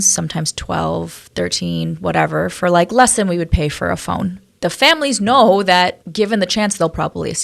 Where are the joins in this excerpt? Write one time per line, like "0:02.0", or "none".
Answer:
0:04.4
0:06.0